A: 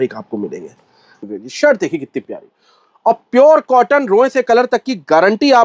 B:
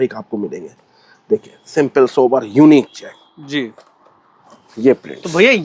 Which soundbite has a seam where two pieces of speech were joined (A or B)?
A